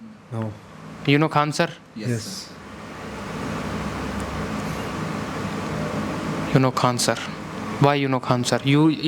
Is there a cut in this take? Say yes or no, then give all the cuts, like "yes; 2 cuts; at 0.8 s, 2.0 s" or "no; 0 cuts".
no; 0 cuts